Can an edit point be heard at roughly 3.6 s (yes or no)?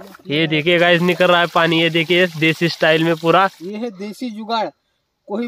yes